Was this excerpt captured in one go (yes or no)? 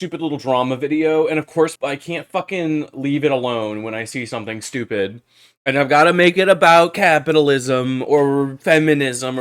yes